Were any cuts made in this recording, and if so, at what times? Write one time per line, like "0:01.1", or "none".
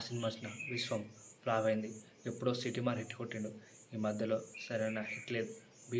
none